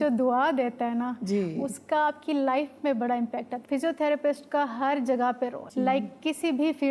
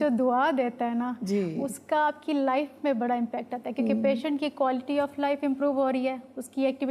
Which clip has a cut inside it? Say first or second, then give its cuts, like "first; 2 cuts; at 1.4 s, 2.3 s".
first; 2 cuts; at 3.5 s, 5.6 s